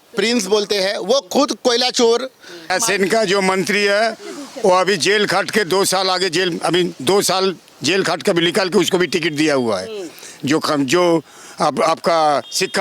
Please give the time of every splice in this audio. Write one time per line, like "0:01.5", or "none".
0:02.7